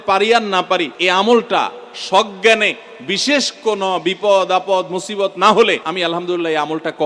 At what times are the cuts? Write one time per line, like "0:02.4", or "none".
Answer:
0:00.9
0:05.9